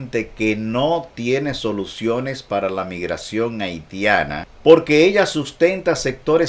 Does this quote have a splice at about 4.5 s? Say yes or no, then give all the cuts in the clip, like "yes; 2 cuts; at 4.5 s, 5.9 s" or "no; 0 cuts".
yes; 1 cut; at 4.5 s